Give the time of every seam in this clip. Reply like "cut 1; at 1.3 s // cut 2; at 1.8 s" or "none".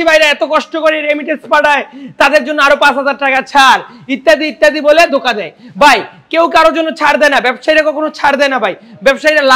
none